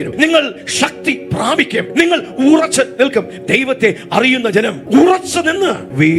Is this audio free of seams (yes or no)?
yes